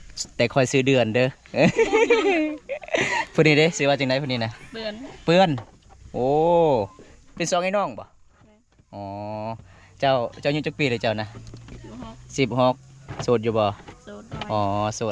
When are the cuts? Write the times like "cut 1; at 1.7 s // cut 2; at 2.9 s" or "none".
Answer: none